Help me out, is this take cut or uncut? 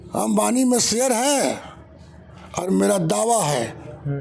uncut